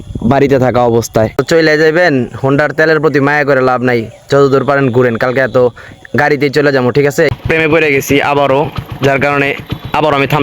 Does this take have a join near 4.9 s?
no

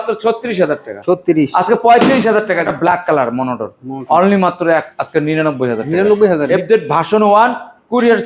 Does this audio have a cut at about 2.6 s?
yes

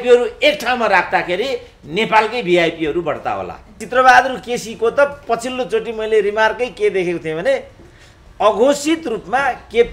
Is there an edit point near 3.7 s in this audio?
yes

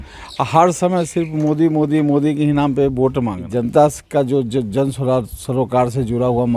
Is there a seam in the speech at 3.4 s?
yes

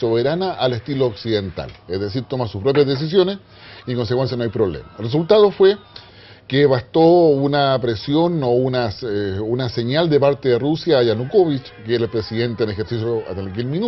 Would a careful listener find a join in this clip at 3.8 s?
yes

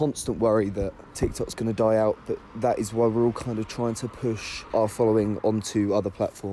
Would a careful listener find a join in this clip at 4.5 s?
yes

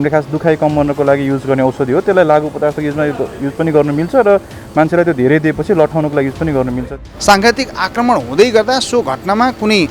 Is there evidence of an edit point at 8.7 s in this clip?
no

